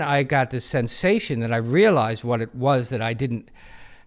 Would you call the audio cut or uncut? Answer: uncut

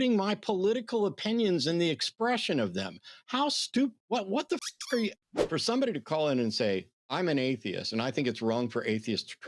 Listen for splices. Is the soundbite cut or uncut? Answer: cut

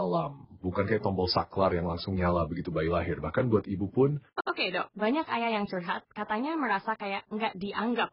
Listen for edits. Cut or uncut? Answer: cut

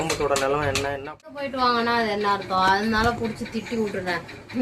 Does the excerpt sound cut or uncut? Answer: cut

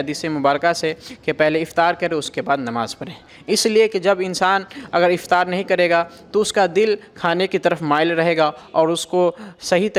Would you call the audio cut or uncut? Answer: uncut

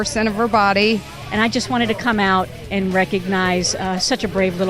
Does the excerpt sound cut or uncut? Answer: cut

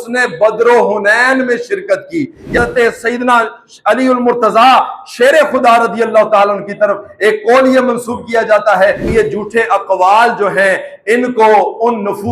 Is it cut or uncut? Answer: cut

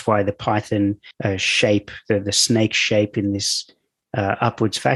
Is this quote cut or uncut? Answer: cut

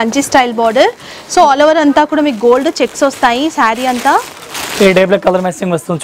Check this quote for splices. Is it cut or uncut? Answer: uncut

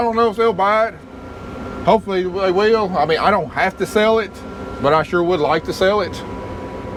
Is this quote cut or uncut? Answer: uncut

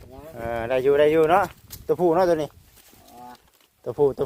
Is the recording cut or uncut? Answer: uncut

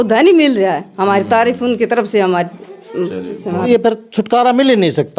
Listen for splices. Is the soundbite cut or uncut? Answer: cut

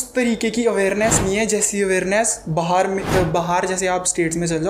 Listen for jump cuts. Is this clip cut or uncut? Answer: uncut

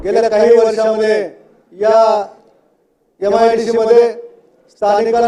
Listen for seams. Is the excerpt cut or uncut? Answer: uncut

